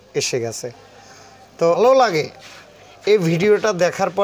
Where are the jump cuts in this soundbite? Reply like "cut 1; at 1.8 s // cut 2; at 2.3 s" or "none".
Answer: cut 1; at 1.8 s